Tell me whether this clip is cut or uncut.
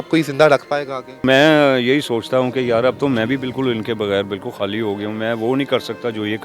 cut